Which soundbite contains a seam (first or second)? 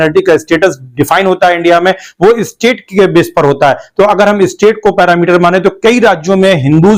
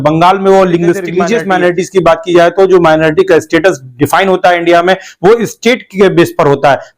second